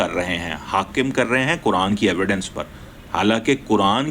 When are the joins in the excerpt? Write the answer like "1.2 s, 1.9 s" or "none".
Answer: none